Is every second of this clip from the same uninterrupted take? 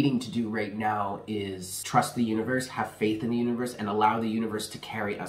no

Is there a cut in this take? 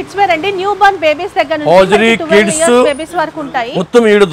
no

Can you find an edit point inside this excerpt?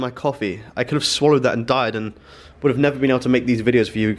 no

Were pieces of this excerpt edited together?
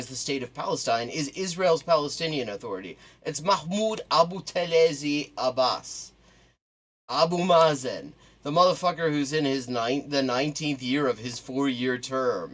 no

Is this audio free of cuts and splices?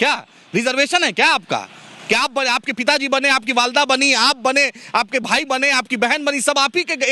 yes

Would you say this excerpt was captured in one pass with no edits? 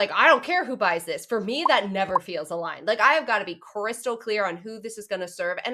yes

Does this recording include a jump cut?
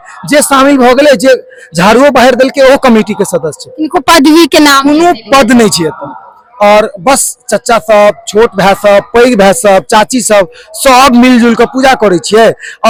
no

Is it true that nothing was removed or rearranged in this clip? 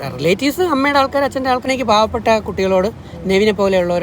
no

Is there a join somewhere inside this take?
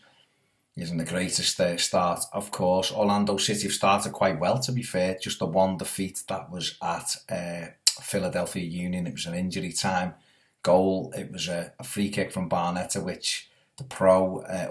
yes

